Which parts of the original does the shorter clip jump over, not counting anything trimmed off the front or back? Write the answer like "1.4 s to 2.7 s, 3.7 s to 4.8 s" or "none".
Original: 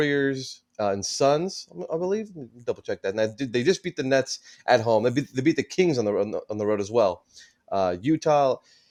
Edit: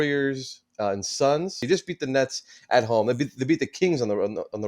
1.7 s to 3.6 s